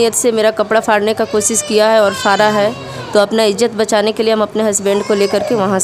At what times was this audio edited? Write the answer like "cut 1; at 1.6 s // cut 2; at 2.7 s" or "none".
none

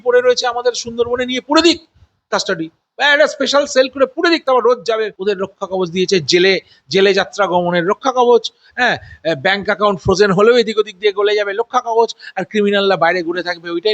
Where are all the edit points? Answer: cut 1; at 5.1 s

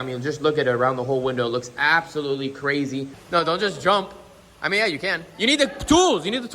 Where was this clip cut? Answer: cut 1; at 3.2 s

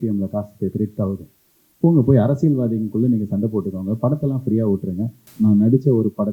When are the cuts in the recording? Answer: cut 1; at 5.2 s

